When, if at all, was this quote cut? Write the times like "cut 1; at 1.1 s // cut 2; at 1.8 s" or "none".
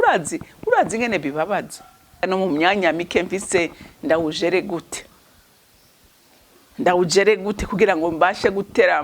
cut 1; at 2.2 s